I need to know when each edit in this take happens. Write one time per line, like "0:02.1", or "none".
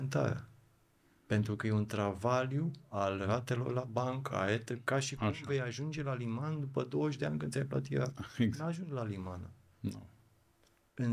none